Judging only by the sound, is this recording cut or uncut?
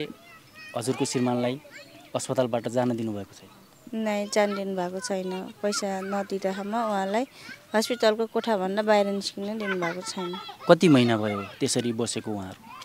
uncut